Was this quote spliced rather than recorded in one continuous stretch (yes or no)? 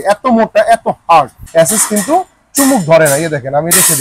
yes